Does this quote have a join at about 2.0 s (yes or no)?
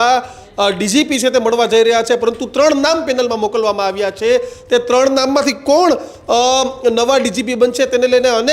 no